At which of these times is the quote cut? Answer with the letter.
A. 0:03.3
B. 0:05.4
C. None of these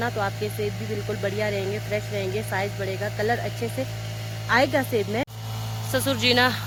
C